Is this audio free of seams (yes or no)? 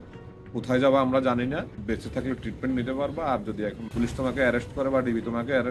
no